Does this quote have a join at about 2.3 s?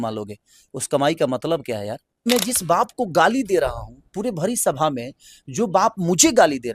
yes; 1 cut; at 2.3 s

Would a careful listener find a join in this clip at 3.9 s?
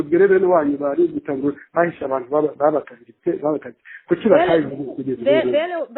no; 0 cuts

